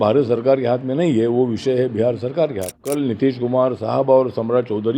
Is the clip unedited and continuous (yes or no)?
no